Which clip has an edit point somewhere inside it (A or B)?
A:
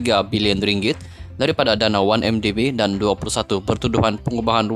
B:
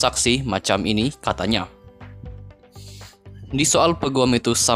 B